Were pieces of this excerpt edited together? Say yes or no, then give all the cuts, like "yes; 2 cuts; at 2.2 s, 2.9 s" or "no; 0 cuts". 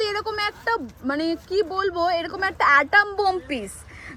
no; 0 cuts